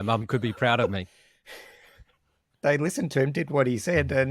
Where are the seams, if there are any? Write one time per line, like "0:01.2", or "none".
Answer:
0:01.3
0:02.5